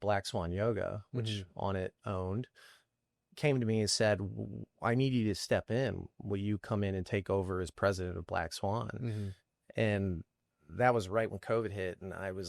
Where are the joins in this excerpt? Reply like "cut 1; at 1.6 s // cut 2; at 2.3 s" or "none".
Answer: none